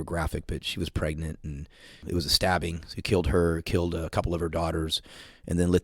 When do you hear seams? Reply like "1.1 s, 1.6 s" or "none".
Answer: 2.0 s